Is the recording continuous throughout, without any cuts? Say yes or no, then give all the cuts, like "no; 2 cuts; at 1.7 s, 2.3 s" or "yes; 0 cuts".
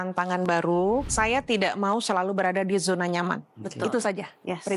no; 1 cut; at 1.1 s